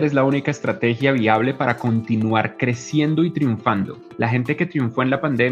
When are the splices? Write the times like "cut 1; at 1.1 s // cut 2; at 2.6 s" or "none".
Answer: cut 1; at 4.0 s

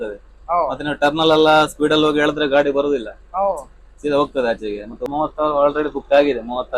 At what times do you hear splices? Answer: cut 1; at 5.0 s

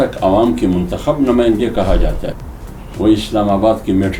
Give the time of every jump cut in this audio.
cut 1; at 2.3 s

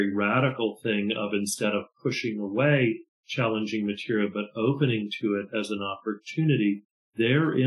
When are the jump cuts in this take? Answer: none

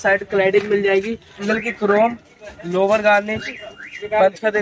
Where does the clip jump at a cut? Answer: cut 1; at 1.4 s

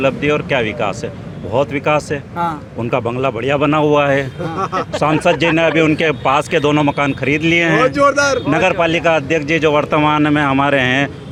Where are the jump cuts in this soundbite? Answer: none

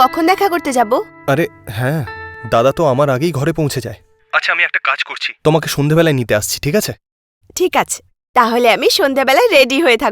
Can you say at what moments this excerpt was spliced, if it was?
none

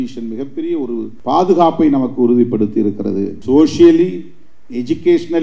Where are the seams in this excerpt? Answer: cut 1; at 1.1 s // cut 2; at 3.4 s

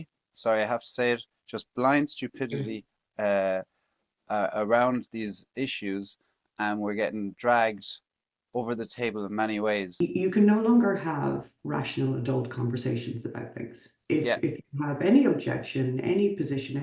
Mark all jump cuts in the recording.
cut 1; at 10.0 s

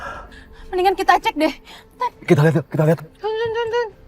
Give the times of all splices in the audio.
cut 1; at 3.1 s

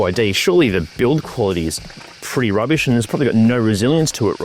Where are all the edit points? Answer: none

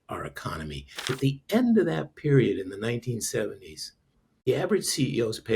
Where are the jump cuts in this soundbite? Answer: cut 1; at 1.2 s // cut 2; at 4.5 s

